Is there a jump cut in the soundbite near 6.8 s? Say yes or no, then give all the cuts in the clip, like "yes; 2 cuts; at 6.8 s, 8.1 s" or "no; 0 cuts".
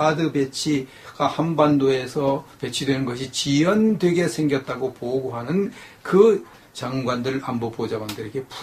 no; 1 cut; at 3.2 s